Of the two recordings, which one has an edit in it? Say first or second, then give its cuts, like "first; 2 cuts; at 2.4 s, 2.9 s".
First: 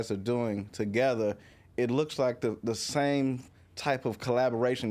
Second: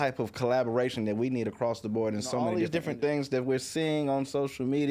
second; 1 cut; at 2.5 s